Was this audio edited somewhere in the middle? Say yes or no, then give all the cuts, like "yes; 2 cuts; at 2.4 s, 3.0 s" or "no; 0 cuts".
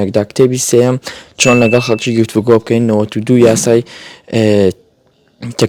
no; 0 cuts